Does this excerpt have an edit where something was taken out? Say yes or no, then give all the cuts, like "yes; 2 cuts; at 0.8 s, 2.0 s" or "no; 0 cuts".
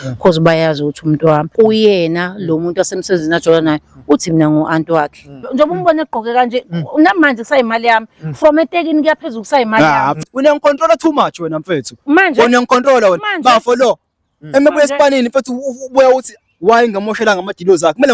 yes; 3 cuts; at 1.5 s, 5.5 s, 10.3 s